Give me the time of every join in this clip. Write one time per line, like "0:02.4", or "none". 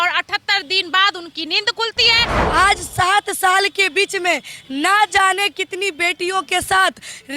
0:02.3